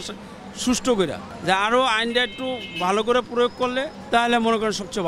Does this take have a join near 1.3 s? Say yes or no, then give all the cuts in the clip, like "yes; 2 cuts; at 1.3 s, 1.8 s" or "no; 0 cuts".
yes; 2 cuts; at 1.3 s, 4.0 s